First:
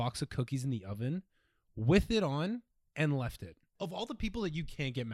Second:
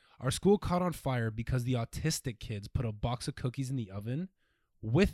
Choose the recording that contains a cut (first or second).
first